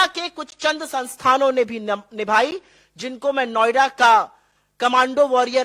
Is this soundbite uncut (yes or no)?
yes